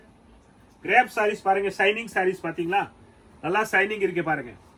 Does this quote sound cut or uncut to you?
uncut